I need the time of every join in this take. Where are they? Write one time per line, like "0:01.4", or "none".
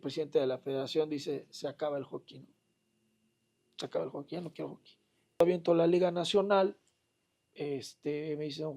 0:05.4